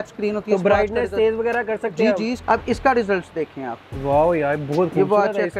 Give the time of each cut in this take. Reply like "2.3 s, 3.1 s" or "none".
2.4 s

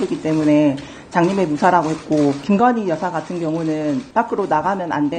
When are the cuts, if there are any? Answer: 2.4 s, 4.1 s

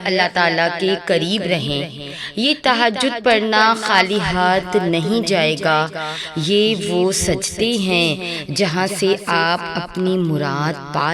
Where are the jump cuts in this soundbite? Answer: none

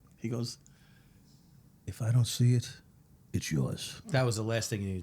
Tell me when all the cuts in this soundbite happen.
3.9 s

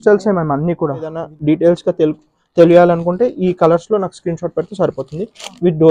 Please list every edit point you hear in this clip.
1.2 s

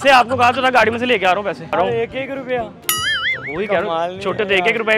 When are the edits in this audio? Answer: 1.7 s

